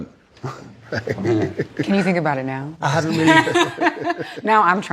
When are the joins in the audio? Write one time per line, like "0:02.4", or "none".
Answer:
0:01.9